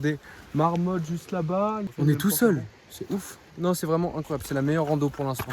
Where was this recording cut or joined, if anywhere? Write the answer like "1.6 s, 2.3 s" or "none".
1.9 s, 3.4 s